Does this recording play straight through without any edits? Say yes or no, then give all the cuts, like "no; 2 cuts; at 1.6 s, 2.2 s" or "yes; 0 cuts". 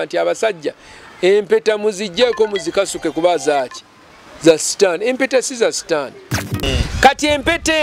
no; 1 cut; at 6.7 s